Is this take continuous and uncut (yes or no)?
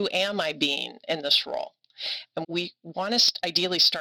no